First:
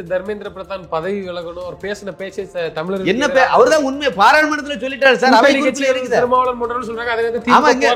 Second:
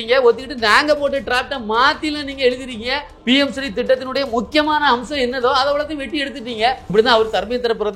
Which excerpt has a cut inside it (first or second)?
second